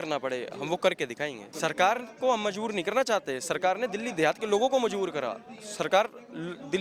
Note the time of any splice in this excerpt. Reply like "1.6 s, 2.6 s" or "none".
1.5 s